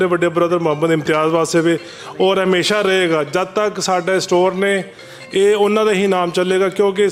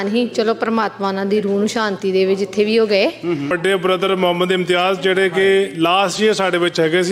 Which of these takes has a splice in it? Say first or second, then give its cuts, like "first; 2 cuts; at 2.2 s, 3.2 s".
second; 1 cut; at 3.5 s